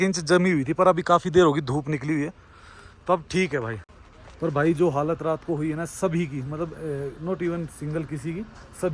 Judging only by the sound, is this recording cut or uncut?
uncut